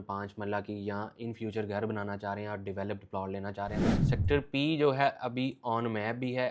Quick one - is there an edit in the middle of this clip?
yes; 1 cut; at 3.9 s

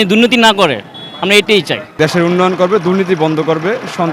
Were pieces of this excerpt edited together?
yes; 1 cut; at 1.9 s

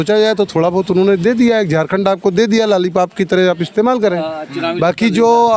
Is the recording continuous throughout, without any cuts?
yes; 0 cuts

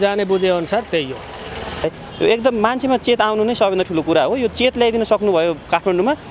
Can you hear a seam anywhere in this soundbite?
yes; 1 cut; at 1.8 s

